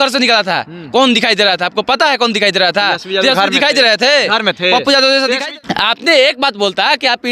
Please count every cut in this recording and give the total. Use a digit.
1